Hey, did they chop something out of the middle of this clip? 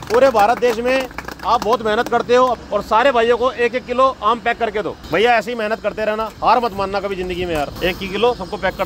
yes; 3 cuts; at 2.6 s, 5.0 s, 7.7 s

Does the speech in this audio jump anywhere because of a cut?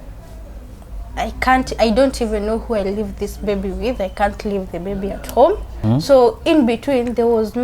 yes; 1 cut; at 5.8 s

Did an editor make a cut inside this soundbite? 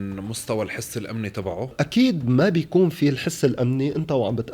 yes; 1 cut; at 1.7 s

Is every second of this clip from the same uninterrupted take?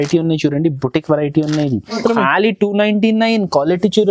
no; 1 cut; at 2.0 s

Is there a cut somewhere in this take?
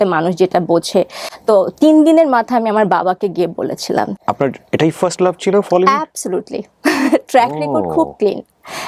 yes; 2 cuts; at 1.2 s, 4.2 s

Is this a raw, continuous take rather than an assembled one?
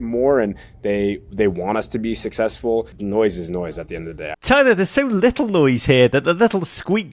no; 2 cuts; at 3.0 s, 4.3 s

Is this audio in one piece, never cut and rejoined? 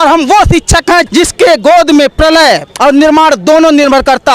no; 2 cuts; at 1.1 s, 2.7 s

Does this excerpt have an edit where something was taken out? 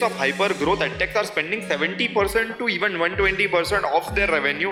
no; 0 cuts

